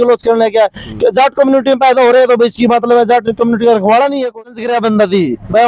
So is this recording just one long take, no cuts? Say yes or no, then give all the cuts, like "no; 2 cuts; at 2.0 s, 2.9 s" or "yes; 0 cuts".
no; 1 cut; at 4.4 s